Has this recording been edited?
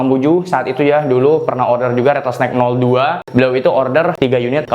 yes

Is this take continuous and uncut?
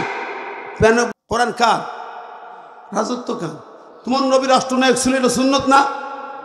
no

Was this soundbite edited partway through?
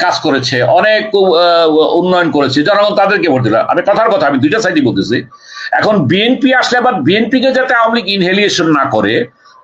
no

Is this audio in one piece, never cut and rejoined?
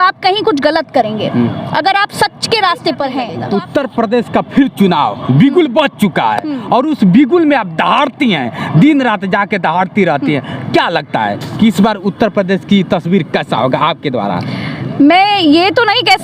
no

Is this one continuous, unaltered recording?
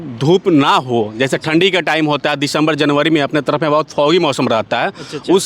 yes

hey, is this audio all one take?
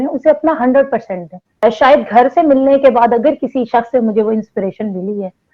no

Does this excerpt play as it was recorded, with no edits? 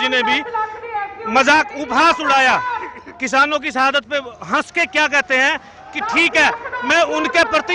yes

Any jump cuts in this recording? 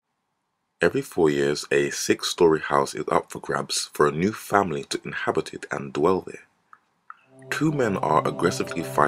no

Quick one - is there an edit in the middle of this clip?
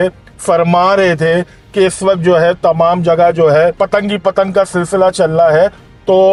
no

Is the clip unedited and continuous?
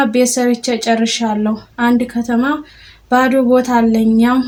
yes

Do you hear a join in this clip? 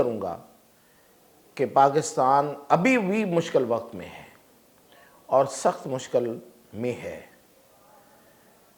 no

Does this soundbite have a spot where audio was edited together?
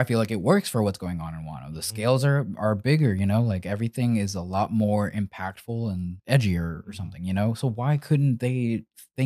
yes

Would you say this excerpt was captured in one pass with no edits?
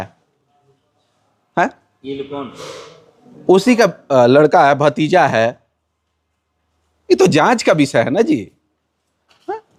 yes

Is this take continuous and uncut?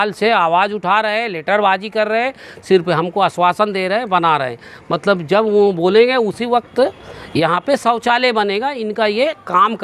yes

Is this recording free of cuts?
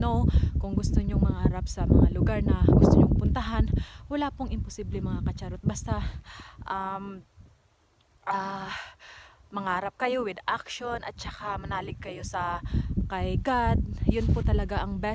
yes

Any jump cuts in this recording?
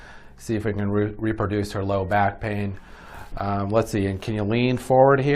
yes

